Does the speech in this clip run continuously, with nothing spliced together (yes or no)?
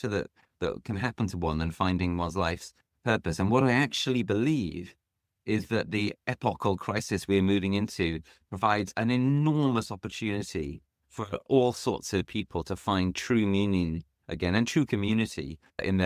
yes